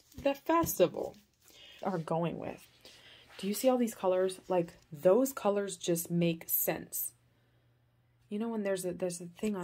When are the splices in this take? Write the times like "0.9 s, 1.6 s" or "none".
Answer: 1.8 s